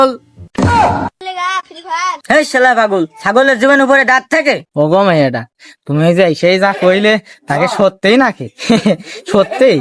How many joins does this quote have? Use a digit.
1